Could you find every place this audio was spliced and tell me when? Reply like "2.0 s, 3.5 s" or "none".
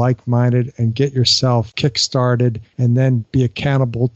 1.7 s, 3.0 s